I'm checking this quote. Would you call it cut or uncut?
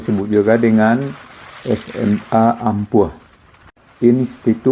cut